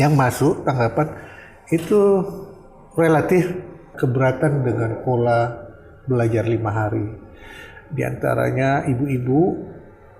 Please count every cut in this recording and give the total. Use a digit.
1